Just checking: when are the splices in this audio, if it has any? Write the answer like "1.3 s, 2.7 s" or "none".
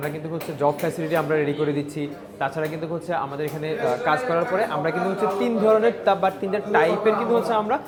none